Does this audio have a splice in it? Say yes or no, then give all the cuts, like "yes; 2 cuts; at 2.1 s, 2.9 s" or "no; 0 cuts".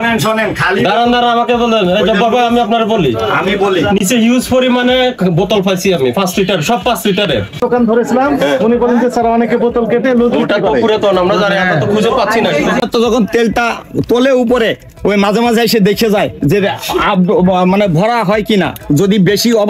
yes; 2 cuts; at 7.6 s, 12.8 s